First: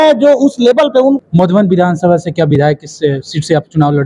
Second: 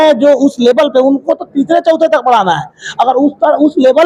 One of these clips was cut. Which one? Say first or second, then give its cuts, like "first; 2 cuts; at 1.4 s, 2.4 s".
first; 1 cut; at 1.2 s